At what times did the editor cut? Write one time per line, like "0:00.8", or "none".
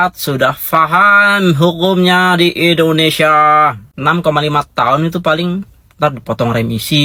none